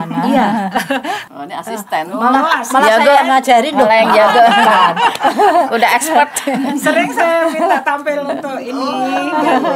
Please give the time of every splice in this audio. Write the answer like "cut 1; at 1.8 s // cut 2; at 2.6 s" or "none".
cut 1; at 1.2 s